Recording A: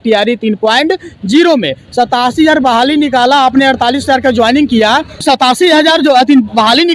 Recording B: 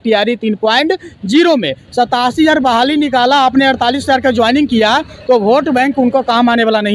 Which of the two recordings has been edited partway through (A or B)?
A